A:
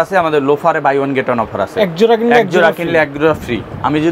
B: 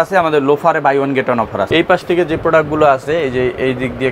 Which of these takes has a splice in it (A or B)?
B